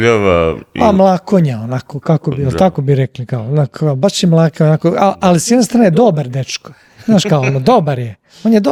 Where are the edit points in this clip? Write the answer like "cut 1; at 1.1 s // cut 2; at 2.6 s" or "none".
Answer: none